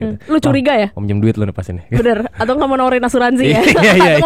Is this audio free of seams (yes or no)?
yes